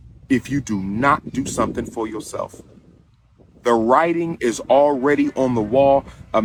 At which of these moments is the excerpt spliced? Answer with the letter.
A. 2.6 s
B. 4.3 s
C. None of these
C